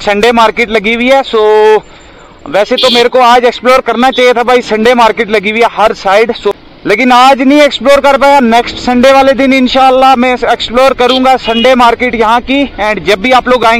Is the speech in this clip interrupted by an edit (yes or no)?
no